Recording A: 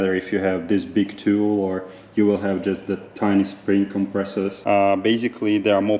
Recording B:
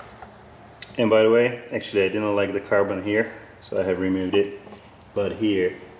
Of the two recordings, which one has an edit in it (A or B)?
A